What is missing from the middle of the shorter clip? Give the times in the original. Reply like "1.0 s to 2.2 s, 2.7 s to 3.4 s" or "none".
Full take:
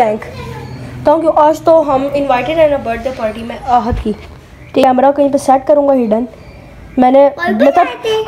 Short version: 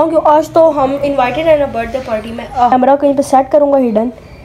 3.8 s to 4.9 s

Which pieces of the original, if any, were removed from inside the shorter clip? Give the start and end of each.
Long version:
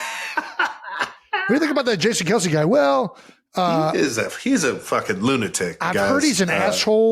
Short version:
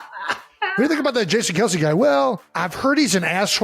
3.4 s to 5.9 s

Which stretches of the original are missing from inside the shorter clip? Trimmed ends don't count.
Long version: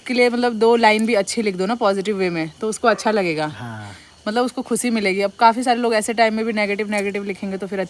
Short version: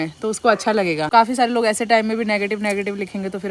3.5 s to 5.3 s

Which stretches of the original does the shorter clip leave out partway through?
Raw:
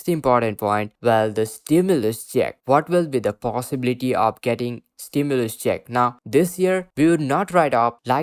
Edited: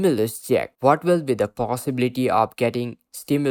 none

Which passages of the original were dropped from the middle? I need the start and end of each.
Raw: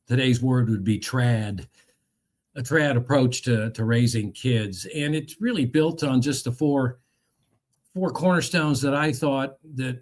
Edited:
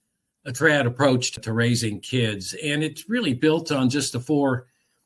3.4 s to 3.6 s

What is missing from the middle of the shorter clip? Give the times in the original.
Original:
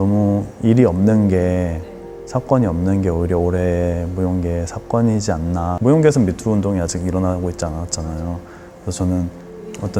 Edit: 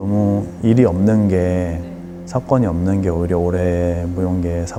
none

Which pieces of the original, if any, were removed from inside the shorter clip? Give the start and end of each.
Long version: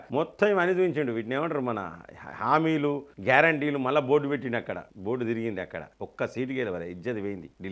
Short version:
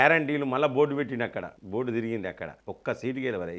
none

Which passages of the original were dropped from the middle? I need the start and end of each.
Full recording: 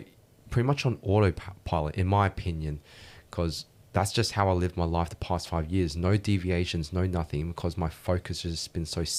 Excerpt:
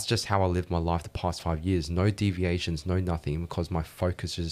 none

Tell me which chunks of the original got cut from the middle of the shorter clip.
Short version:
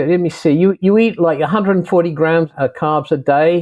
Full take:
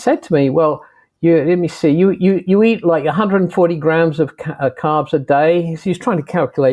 2.2 s to 2.4 s, 4.1 s to 4.5 s

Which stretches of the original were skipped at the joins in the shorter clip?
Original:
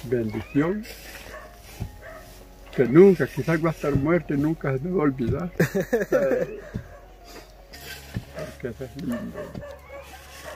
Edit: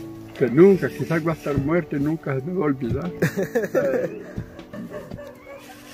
7.1 s to 9.2 s

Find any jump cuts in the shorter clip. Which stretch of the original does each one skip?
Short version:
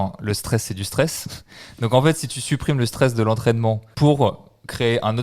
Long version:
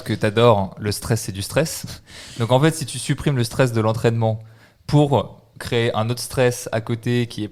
4.4 s to 4.8 s

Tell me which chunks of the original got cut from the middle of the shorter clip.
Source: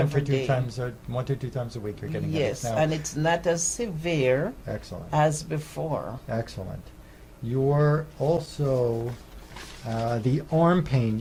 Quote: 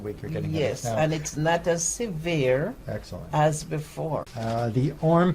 6.1 s to 9.8 s

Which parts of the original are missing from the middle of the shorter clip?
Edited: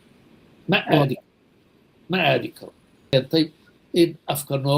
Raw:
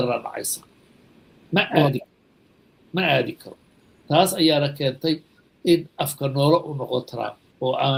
3.9 s to 4.7 s

